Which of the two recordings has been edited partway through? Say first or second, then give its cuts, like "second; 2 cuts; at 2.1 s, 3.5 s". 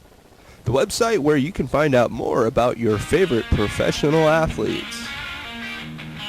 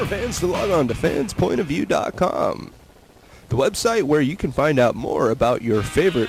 first; 1 cut; at 4.8 s